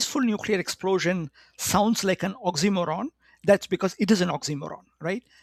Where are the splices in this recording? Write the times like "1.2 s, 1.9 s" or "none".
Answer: none